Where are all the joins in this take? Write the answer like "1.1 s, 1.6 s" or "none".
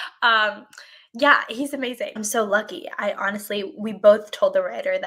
2.2 s